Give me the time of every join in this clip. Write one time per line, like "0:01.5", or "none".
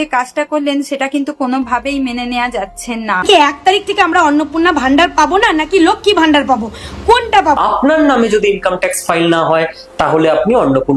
0:03.2
0:07.6